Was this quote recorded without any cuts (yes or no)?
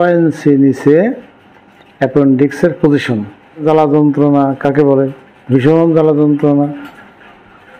no